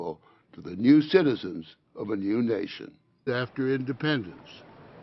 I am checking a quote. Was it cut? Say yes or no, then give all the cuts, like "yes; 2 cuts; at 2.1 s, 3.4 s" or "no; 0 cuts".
no; 0 cuts